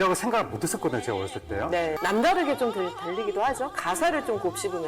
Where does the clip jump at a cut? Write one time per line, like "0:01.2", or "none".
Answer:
0:02.0